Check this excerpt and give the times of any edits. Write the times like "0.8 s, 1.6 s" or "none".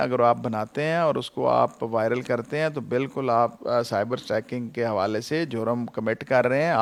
none

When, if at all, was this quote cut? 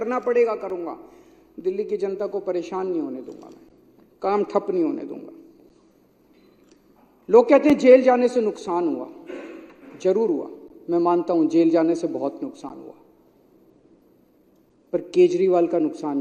none

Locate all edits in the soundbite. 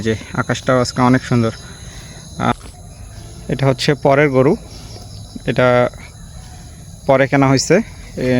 2.5 s

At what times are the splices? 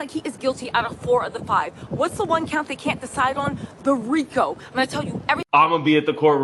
5.4 s

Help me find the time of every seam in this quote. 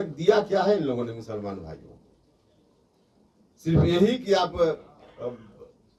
none

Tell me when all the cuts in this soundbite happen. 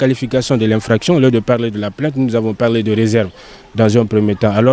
none

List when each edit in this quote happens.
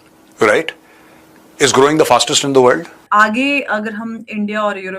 3.0 s

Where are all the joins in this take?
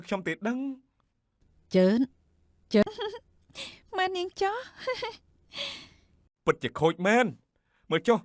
2.8 s

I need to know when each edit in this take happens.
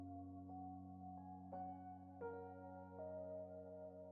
none

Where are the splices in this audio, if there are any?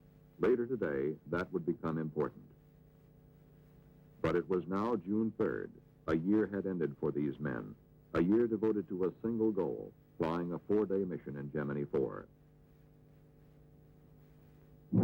8.6 s

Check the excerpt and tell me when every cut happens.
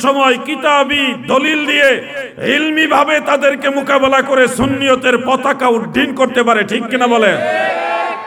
none

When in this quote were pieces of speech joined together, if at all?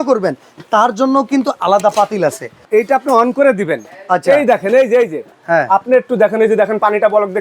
2.6 s, 5.4 s

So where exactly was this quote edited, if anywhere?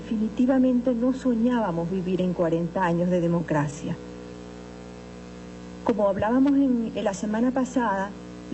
7.1 s

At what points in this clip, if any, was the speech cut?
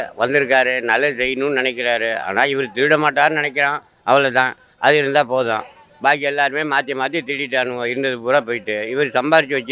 none

